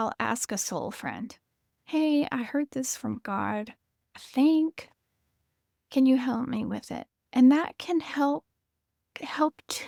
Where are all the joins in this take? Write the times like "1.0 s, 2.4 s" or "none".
none